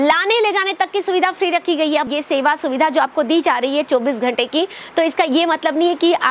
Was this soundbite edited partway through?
yes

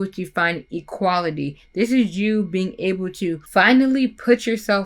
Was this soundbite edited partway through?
yes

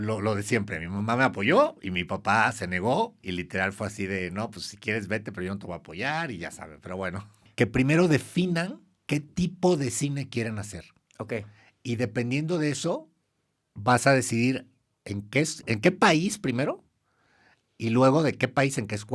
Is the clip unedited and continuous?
no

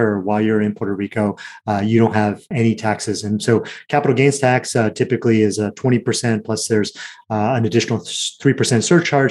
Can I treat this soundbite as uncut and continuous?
no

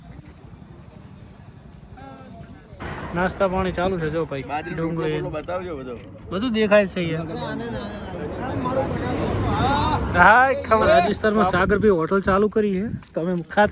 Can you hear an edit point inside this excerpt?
yes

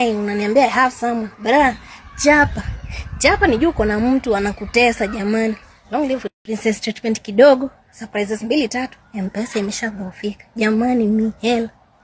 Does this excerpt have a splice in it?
yes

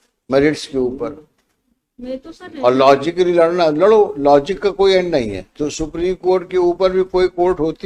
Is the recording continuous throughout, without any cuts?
yes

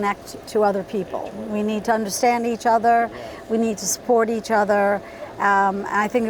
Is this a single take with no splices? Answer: yes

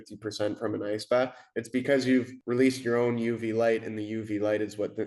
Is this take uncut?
no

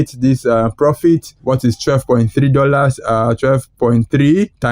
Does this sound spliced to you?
yes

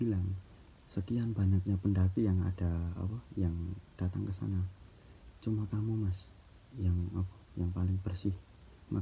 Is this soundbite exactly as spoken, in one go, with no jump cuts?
yes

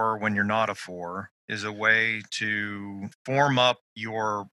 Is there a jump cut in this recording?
yes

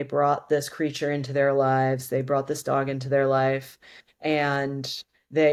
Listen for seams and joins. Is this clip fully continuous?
yes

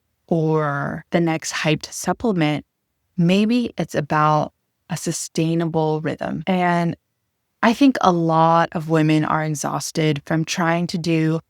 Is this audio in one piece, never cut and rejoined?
no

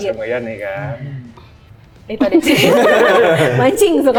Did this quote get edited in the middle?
no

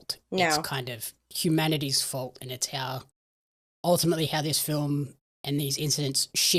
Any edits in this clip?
no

